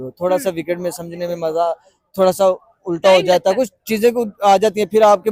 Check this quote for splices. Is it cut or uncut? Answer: uncut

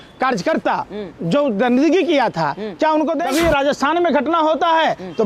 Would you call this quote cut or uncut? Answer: cut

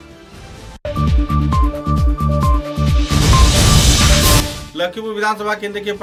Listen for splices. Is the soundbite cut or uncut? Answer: uncut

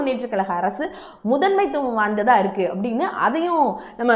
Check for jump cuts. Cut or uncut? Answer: uncut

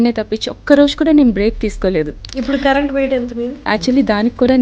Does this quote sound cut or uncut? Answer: cut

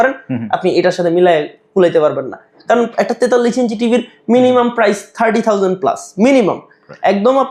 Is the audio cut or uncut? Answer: uncut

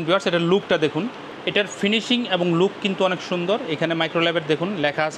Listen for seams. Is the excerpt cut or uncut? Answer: cut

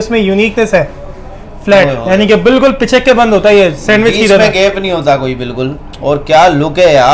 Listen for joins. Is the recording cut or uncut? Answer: uncut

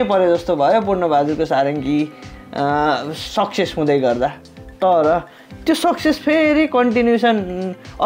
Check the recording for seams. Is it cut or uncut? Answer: uncut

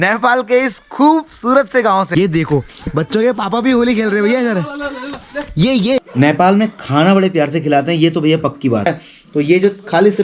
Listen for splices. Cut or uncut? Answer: cut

